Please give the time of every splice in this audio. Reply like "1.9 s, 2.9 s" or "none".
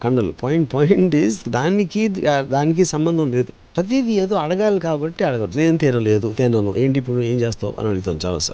3.7 s